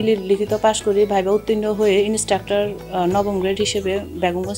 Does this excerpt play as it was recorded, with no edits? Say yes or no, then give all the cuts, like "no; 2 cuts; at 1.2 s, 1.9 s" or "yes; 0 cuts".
yes; 0 cuts